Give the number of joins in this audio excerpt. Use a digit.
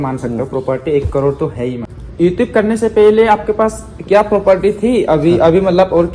1